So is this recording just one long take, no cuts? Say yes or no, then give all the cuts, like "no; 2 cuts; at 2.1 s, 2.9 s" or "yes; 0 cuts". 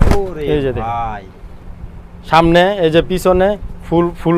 yes; 0 cuts